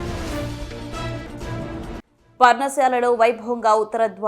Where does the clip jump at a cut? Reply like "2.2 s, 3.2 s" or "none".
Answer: 2.0 s